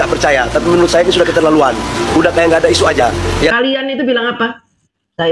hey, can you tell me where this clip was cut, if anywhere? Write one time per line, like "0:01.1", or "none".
0:03.5